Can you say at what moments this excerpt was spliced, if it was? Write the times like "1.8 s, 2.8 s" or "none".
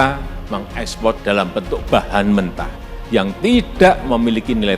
1.2 s